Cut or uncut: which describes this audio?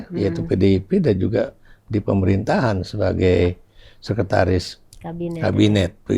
uncut